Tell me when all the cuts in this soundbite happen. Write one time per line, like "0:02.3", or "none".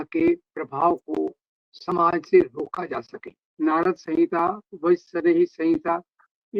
0:03.5